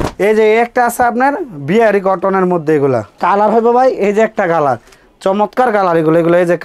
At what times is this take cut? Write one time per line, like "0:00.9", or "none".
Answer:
0:03.2